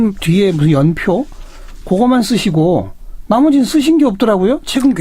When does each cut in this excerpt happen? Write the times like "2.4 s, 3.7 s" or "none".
2.4 s